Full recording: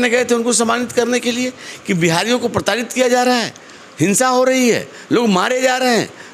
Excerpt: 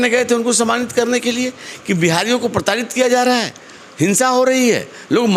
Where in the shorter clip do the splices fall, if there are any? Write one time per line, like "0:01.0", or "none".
none